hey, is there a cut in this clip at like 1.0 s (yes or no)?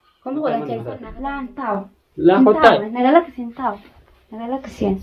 yes